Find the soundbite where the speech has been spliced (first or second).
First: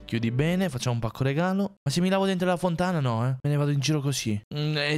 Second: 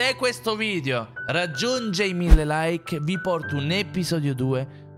first